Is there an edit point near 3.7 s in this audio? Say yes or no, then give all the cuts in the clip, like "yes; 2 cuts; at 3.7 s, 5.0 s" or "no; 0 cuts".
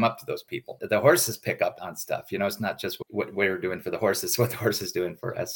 no; 2 cuts; at 0.8 s, 1.7 s